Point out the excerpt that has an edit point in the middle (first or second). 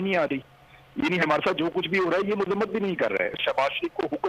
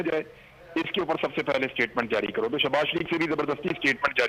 first